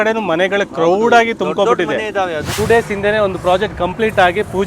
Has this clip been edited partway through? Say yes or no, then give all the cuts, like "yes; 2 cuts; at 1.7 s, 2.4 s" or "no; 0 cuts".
yes; 1 cut; at 2.6 s